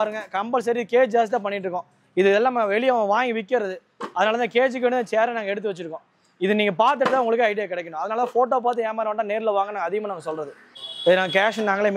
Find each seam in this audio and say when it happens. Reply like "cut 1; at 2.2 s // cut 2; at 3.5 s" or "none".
cut 1; at 10.6 s